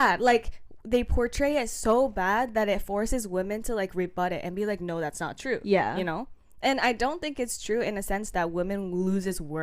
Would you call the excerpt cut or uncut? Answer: cut